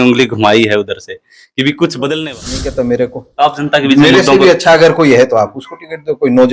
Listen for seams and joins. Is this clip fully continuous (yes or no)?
no